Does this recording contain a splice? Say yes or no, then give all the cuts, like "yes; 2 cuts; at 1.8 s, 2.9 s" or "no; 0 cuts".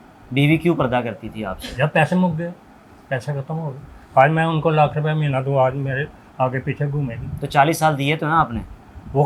no; 0 cuts